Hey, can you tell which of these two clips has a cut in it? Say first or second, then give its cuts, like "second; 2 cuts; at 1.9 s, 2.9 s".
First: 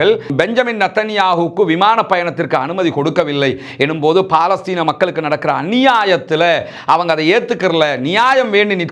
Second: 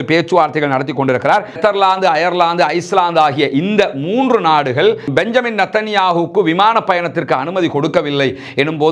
second; 1 cut; at 1.5 s